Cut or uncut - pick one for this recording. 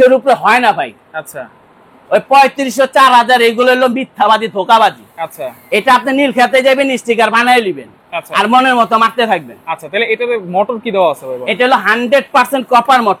uncut